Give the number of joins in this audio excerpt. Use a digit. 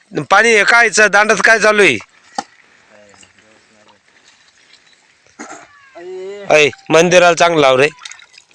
0